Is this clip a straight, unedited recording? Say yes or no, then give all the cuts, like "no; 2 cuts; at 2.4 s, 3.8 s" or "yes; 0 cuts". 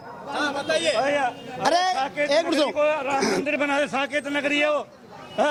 yes; 0 cuts